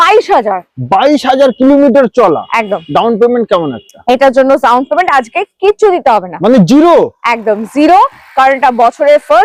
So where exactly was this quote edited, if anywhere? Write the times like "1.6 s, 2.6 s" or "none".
none